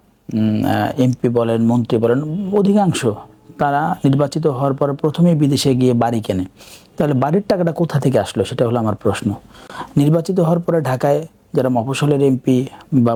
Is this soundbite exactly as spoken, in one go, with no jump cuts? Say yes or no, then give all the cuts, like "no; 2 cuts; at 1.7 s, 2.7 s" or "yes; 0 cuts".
yes; 0 cuts